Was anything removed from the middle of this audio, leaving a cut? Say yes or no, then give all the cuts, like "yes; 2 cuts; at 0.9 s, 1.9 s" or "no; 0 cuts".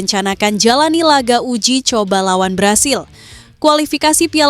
no; 0 cuts